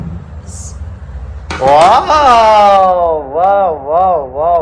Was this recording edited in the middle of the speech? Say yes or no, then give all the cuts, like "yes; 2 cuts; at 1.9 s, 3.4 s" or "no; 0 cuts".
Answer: no; 0 cuts